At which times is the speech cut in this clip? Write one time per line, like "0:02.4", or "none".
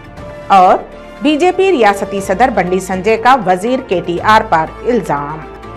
none